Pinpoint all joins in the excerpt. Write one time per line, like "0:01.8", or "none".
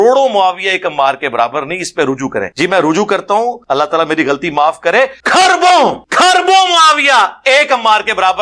0:02.5
0:03.6
0:05.2
0:06.0